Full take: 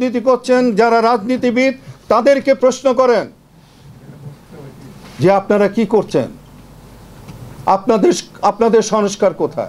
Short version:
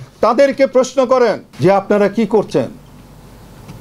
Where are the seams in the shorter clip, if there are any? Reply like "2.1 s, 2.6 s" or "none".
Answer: 1.5 s